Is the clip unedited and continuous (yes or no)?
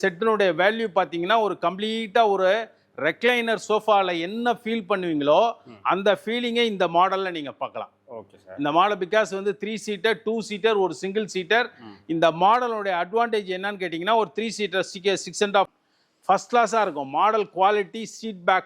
no